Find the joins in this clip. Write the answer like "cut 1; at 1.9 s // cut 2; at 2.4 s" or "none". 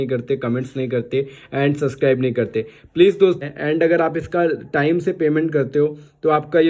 cut 1; at 3.4 s